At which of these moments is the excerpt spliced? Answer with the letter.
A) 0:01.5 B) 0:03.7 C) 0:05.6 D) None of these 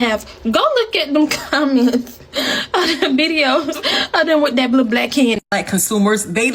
C